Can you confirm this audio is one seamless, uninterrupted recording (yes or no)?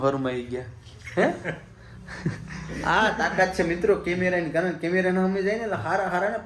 yes